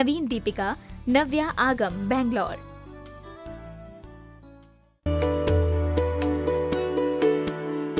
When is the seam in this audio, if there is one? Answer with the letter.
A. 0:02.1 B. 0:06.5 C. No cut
A